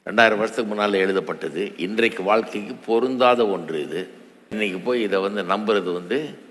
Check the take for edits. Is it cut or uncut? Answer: cut